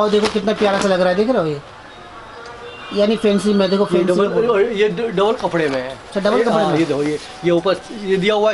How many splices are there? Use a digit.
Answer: 0